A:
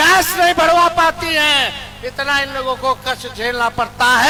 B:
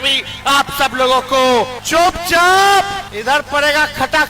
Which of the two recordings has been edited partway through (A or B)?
B